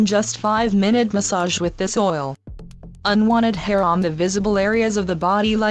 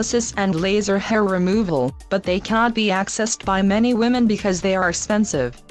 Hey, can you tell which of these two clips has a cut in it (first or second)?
second